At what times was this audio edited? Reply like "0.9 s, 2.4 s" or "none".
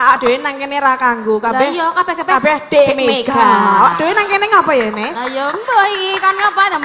none